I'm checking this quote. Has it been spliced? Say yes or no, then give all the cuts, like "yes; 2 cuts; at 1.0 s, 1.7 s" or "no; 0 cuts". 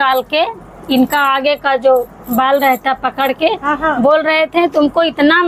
no; 0 cuts